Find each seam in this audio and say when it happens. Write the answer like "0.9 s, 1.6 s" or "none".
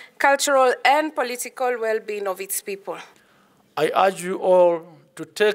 3.2 s

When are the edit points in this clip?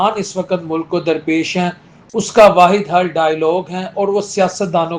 none

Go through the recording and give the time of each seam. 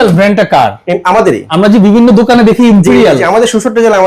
1.5 s

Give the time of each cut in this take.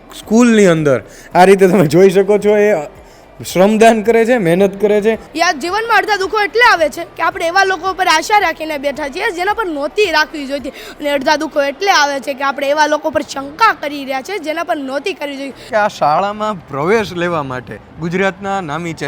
5.2 s, 15.7 s

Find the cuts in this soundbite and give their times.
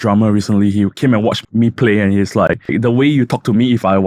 1.4 s, 2.7 s

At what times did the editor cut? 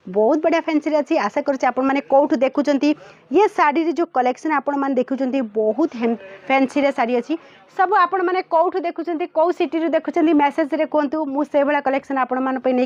none

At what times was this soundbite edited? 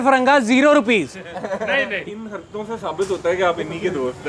2.0 s

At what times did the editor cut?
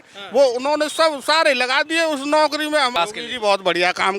2.9 s

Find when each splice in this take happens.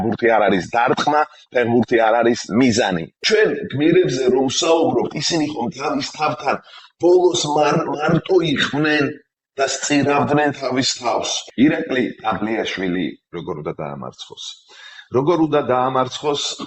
3.1 s, 11.4 s

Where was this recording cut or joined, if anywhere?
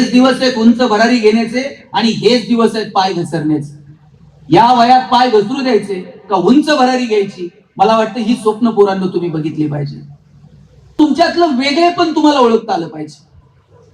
10.9 s

